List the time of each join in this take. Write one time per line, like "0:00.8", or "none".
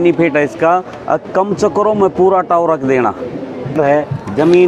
0:03.7